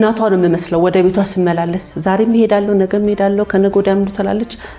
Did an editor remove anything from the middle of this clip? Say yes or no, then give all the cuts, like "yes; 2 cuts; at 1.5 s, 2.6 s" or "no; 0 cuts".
no; 0 cuts